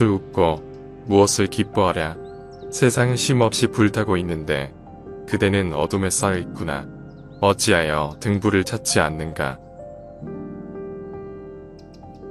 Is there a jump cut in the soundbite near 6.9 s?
no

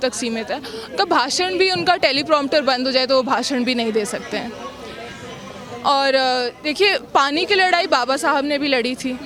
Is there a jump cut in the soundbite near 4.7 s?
no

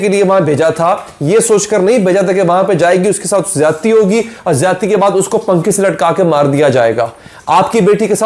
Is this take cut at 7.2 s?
no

